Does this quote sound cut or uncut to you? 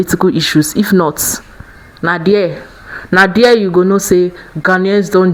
uncut